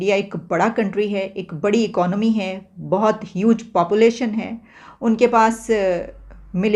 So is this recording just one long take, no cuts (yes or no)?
yes